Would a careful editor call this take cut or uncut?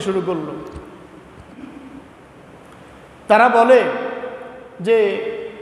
cut